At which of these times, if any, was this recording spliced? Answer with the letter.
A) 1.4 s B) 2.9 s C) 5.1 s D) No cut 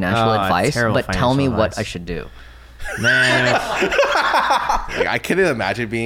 C